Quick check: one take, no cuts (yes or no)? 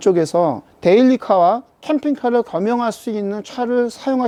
yes